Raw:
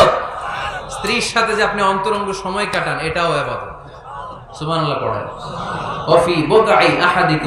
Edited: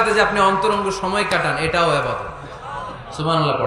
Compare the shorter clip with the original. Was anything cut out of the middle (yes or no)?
no